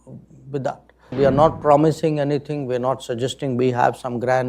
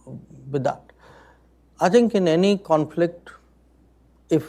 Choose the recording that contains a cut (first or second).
first